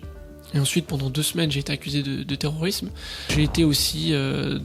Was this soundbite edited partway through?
yes; 1 cut; at 3.2 s

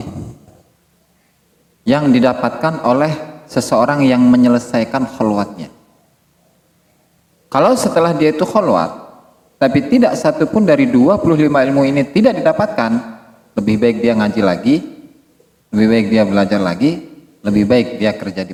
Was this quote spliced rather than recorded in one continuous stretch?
no; 0 cuts

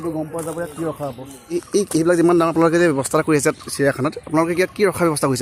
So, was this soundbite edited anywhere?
yes; 1 cut; at 1.7 s

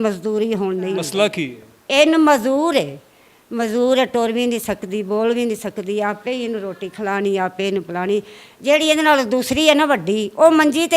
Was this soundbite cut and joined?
yes; 1 cut; at 1.1 s

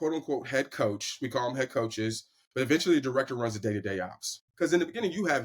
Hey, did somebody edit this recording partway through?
yes; 1 cut; at 4.4 s

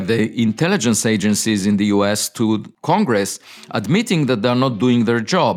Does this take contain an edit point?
yes; 1 cut; at 2.7 s

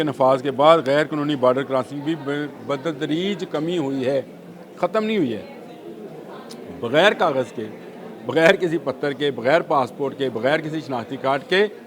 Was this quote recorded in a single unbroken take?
yes; 0 cuts

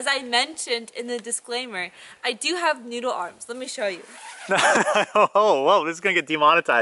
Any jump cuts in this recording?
no; 0 cuts

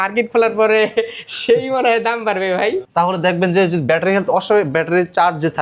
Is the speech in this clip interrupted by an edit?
yes; 1 cut; at 2.8 s

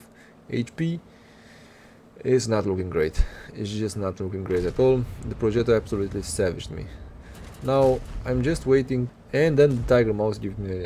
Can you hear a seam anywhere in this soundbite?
yes; 1 cut; at 9.1 s

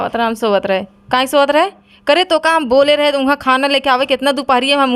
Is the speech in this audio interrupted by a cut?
no; 0 cuts

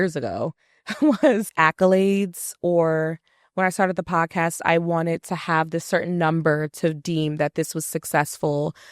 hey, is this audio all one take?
no; 1 cut; at 1.5 s

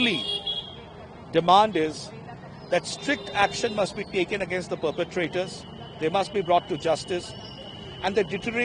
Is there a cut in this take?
no; 0 cuts

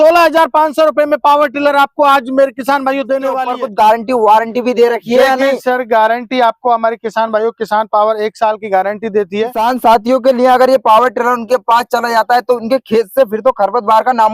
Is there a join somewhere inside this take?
yes; 2 cuts; at 3.5 s, 9.6 s

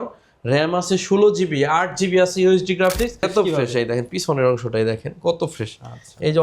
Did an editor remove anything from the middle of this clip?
yes; 1 cut; at 3.3 s

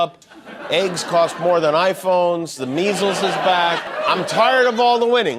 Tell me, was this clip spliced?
yes; 1 cut; at 3.9 s

